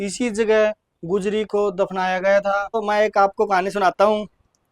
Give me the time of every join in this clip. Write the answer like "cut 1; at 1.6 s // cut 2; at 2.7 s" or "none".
cut 1; at 2.8 s